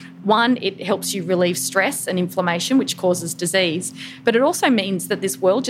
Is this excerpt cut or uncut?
uncut